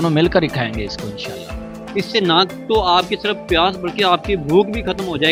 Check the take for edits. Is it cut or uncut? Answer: uncut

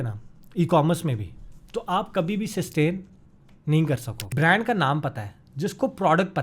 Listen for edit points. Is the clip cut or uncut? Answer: cut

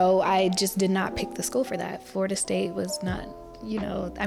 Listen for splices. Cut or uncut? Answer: uncut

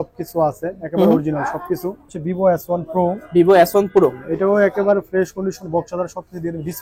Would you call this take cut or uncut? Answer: cut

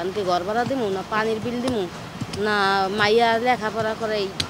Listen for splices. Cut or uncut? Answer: uncut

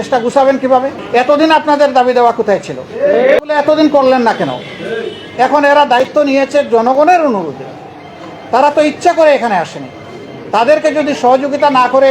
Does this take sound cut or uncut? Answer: cut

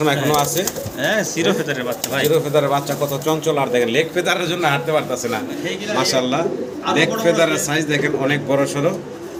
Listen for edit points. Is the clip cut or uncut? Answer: uncut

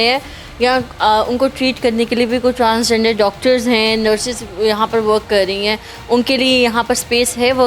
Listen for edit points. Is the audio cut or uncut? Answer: uncut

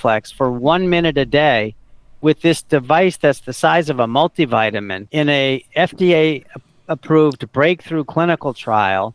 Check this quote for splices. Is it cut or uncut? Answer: uncut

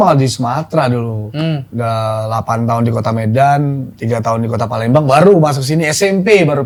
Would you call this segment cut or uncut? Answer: uncut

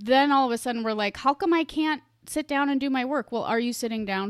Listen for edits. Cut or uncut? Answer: uncut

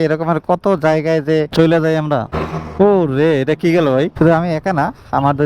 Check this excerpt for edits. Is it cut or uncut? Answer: cut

